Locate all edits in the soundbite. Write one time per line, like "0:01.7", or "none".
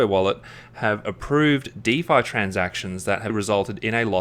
none